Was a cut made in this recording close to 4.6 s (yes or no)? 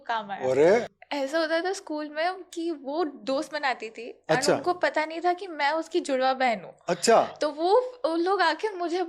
no